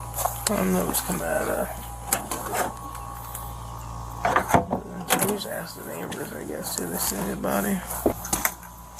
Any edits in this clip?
no; 0 cuts

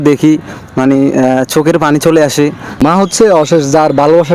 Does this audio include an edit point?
yes; 1 cut; at 2.7 s

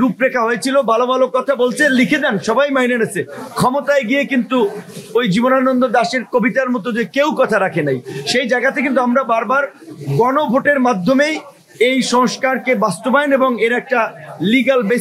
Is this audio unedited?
yes; 0 cuts

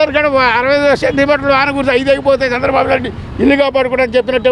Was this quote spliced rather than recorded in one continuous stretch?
no; 0 cuts

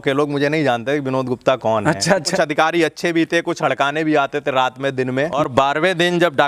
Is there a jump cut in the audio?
yes; 2 cuts; at 2.3 s, 5.4 s

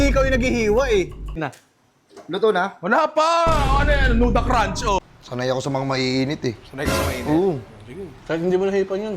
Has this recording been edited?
yes; 2 cuts; at 1.5 s, 5.0 s

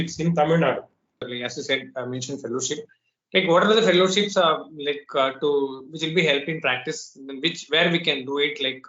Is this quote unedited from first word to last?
no; 1 cut; at 1.2 s

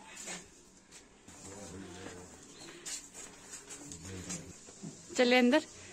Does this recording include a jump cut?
yes; 1 cut; at 1.3 s

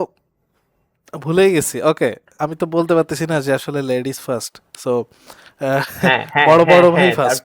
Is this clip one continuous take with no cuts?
no; 1 cut; at 2.3 s

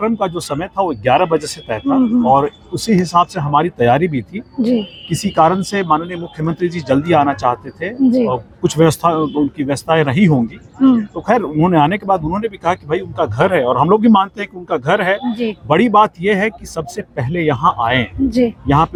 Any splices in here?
no; 0 cuts

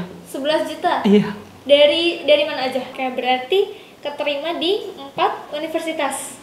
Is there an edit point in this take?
yes; 1 cut; at 3.0 s

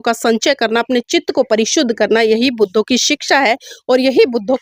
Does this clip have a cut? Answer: no; 0 cuts

